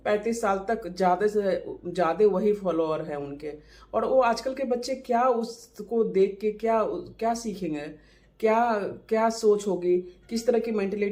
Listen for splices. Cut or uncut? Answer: uncut